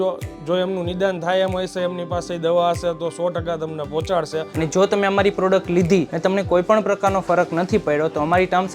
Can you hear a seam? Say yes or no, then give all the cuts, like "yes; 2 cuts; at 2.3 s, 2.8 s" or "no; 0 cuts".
yes; 2 cuts; at 4.4 s, 6.1 s